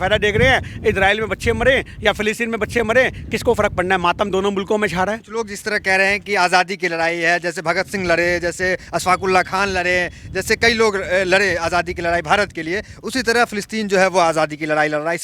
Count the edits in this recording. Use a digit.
0